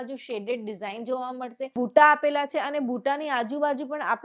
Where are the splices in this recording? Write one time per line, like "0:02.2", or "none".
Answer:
0:01.7